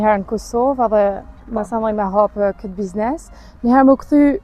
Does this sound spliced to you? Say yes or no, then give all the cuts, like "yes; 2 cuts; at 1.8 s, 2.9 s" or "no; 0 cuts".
no; 0 cuts